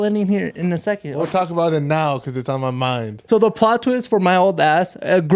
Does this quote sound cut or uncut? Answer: cut